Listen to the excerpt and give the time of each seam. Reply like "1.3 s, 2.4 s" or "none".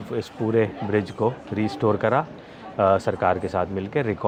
none

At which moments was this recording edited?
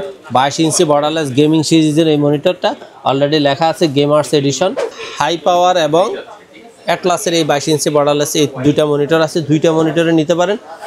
4.9 s

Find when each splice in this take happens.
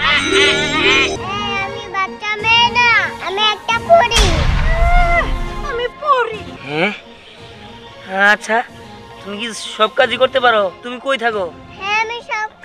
1.2 s, 6.5 s

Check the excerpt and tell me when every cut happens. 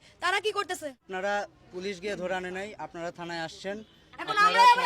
1.0 s

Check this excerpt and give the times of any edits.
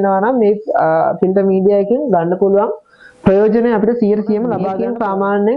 4.7 s

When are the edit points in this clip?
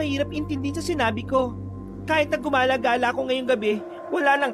none

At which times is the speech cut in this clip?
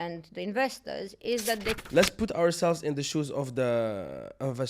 1.8 s

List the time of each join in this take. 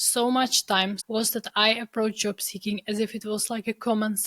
1.0 s

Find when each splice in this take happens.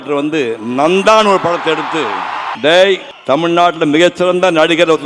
2.5 s, 3.1 s

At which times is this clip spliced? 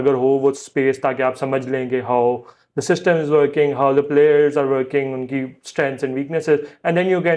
none

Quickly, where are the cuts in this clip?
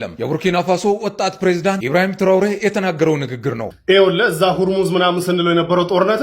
3.7 s

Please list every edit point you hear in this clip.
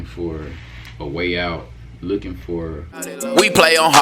2.9 s

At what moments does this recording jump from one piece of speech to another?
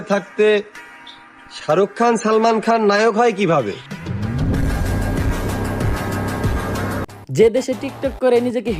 7.1 s

